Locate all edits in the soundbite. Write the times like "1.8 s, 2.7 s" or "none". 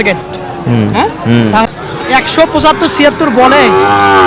1.6 s